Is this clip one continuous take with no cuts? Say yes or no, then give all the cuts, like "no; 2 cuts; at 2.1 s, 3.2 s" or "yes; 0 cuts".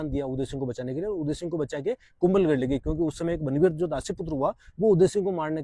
yes; 0 cuts